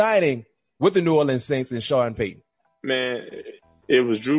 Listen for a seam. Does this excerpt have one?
no; 0 cuts

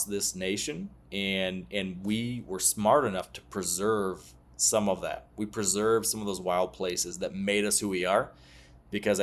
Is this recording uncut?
yes; 0 cuts

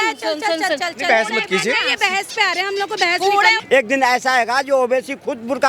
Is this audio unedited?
no; 1 cut; at 3.6 s

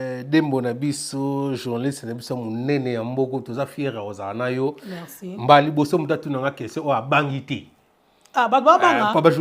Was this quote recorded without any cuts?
yes; 0 cuts

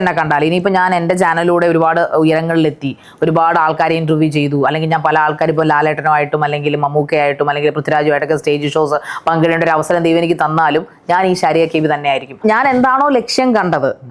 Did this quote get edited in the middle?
yes; 1 cut; at 12.4 s

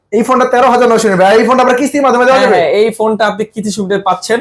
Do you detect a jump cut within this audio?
no; 0 cuts

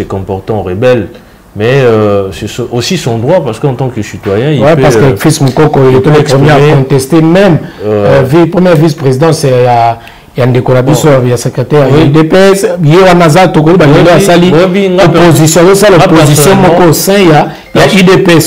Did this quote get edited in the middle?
no; 0 cuts

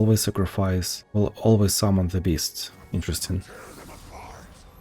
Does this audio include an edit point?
yes; 1 cut; at 1.0 s

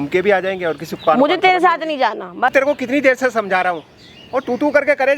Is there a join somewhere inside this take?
yes; 1 cut; at 2.5 s

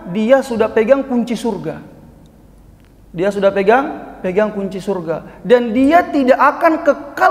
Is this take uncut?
yes; 0 cuts

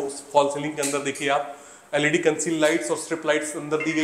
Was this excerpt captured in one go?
yes; 0 cuts

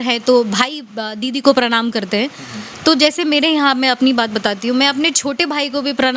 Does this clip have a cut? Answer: no; 0 cuts

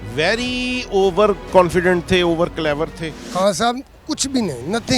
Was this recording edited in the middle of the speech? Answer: yes; 1 cut; at 3.2 s

